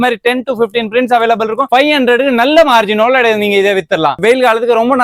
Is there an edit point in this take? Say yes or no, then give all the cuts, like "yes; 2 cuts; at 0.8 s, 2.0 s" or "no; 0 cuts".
no; 0 cuts